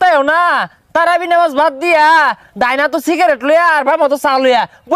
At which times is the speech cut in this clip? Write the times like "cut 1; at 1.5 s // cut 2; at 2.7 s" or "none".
none